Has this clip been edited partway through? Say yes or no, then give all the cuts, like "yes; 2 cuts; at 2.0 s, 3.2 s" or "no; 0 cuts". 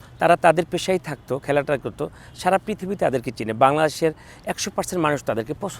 no; 0 cuts